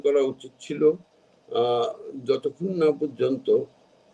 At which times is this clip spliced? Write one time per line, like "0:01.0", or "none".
none